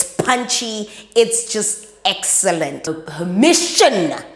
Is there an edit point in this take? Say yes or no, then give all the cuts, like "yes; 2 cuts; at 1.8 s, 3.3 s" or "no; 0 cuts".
yes; 1 cut; at 2.8 s